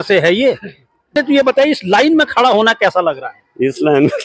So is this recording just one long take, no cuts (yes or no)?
no